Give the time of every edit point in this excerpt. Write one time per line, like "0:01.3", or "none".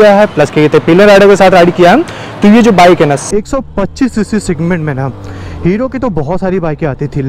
0:03.2